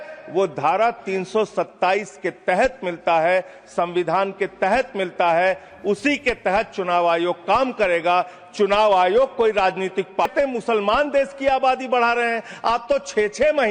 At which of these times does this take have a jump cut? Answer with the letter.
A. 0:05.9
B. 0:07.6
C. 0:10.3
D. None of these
C